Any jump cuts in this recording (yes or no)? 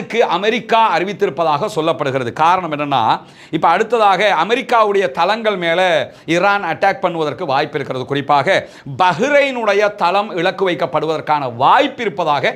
no